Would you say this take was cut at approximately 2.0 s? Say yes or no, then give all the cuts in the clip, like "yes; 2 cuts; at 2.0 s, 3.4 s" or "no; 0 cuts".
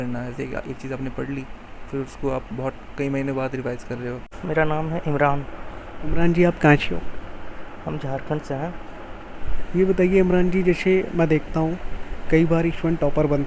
no; 1 cut; at 4.3 s